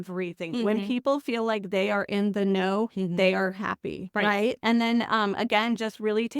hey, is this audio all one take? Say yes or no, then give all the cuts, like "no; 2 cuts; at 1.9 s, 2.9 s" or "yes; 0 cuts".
no; 1 cut; at 4.6 s